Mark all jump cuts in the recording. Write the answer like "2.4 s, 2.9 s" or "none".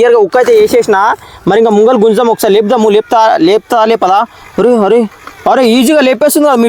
none